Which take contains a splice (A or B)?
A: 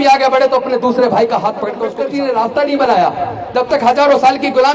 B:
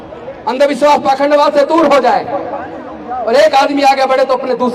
A